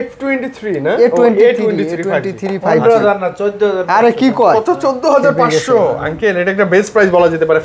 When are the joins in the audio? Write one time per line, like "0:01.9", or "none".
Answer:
none